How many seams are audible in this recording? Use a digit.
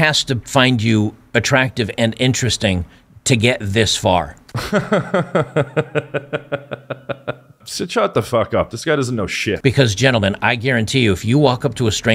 1